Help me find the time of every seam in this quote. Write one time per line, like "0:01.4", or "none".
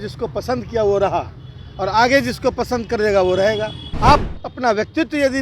0:03.8